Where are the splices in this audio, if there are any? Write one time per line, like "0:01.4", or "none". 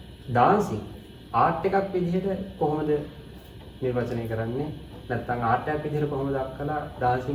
none